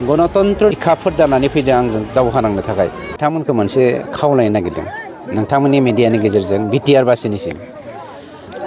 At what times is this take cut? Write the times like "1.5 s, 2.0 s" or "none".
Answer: 0.7 s, 3.1 s